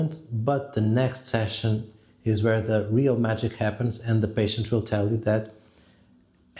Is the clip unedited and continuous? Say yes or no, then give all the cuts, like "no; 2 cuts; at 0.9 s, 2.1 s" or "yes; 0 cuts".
yes; 0 cuts